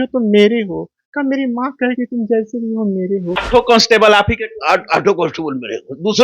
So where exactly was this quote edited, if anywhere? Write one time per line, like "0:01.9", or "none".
0:03.4